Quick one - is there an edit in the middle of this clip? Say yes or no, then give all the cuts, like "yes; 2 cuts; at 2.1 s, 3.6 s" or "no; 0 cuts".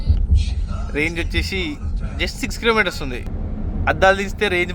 yes; 1 cut; at 3.3 s